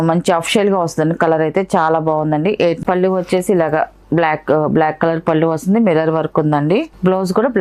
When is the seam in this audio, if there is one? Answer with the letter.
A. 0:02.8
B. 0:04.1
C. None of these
A